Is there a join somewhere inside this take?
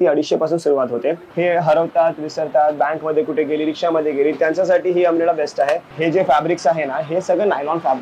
yes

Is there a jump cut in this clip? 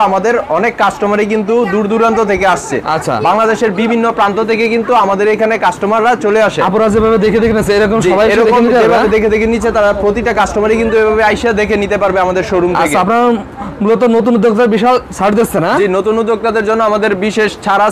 no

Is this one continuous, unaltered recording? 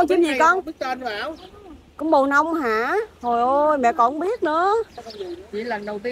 yes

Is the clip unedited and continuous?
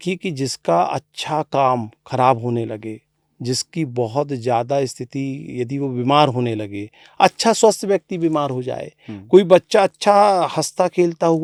yes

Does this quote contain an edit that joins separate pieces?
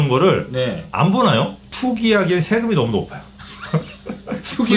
yes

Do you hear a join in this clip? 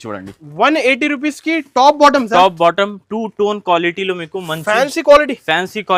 no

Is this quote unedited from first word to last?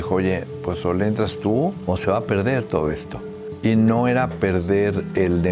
yes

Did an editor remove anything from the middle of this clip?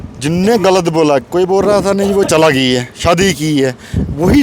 no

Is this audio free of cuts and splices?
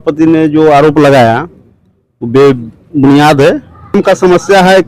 no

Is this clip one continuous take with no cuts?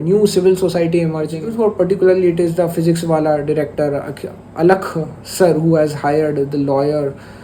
no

